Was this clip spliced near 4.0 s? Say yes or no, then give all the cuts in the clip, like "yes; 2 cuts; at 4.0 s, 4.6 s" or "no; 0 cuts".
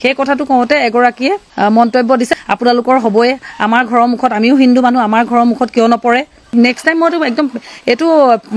no; 3 cuts; at 1.5 s, 2.3 s, 6.5 s